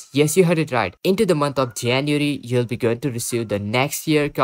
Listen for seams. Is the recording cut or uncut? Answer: uncut